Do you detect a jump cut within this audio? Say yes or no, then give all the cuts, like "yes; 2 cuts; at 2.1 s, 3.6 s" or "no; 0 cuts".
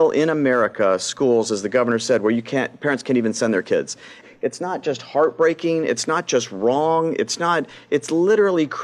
yes; 1 cut; at 4.2 s